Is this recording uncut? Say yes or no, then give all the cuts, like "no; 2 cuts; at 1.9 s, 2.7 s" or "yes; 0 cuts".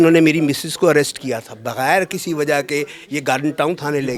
yes; 0 cuts